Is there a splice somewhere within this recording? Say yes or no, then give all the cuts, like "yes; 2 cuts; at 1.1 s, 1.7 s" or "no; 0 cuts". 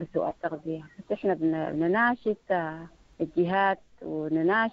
no; 0 cuts